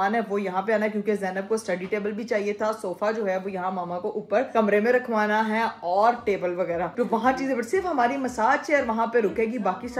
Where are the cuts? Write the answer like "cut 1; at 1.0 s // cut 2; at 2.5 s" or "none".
none